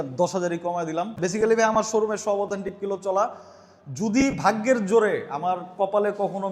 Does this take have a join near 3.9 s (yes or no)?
no